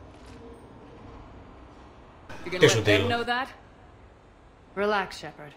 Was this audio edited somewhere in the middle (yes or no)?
yes